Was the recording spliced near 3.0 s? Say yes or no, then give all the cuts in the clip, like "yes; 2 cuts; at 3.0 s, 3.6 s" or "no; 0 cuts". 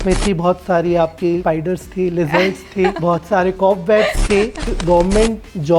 yes; 3 cuts; at 1.4 s, 3.0 s, 4.8 s